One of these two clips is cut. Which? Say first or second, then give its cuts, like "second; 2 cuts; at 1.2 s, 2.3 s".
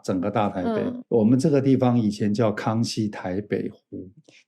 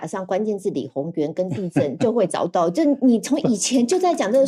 first; 1 cut; at 1.0 s